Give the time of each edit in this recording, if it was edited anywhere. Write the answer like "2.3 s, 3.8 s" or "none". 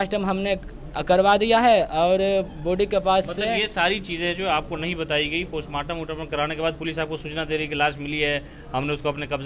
none

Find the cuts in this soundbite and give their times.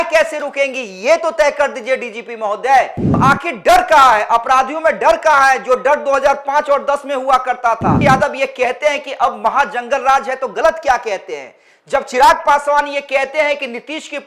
3.0 s, 8.0 s

